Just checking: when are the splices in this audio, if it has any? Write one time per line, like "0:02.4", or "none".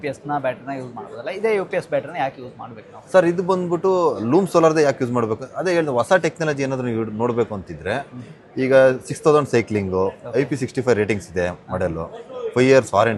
none